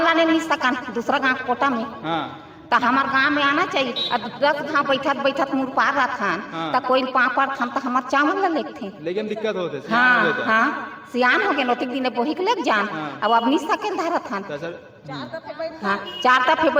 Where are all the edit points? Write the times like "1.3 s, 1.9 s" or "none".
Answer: none